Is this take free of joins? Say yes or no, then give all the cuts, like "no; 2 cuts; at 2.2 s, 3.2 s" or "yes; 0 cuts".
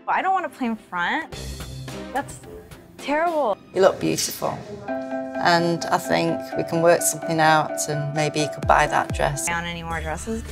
no; 2 cuts; at 3.6 s, 9.4 s